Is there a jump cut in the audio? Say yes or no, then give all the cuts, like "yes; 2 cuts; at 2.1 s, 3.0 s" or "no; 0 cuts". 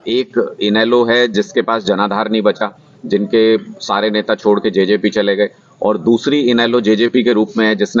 no; 0 cuts